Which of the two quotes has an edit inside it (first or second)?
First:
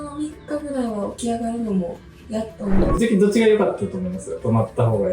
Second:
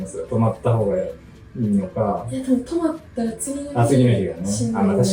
first